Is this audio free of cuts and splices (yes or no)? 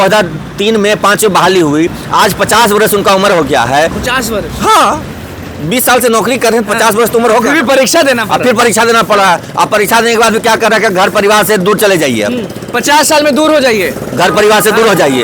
yes